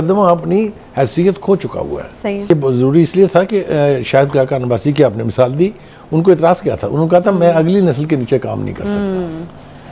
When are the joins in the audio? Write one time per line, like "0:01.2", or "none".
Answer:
0:02.5